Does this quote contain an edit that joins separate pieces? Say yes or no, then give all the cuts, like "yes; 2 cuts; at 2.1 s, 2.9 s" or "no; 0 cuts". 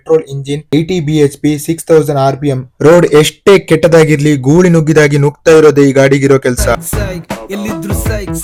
no; 0 cuts